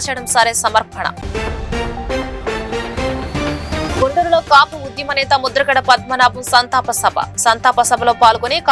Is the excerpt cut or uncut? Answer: uncut